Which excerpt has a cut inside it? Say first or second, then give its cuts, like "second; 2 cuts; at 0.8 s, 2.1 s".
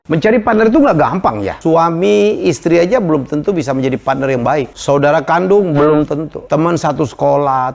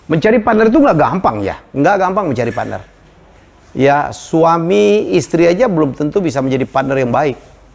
first; 3 cuts; at 1.5 s, 4.7 s, 6.3 s